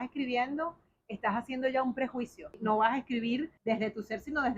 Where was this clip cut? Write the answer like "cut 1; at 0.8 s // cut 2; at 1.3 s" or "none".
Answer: cut 1; at 2.5 s // cut 2; at 3.5 s

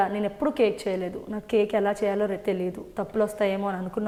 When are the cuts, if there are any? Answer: none

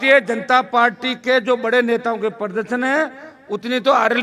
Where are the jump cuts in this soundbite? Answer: none

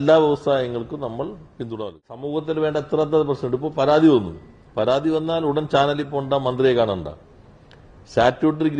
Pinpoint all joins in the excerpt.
cut 1; at 2.2 s

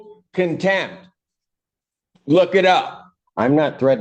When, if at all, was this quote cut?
cut 1; at 2.8 s

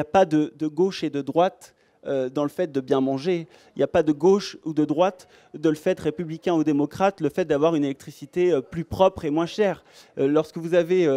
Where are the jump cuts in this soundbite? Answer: none

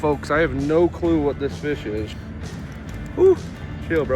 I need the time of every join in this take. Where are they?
cut 1; at 2.1 s

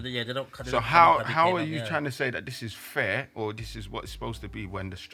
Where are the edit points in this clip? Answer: none

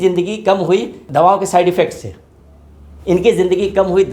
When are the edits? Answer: cut 1; at 1.0 s

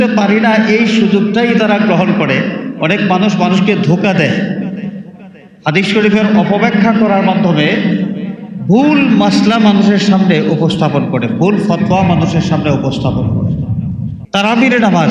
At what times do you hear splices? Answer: cut 1; at 14.1 s

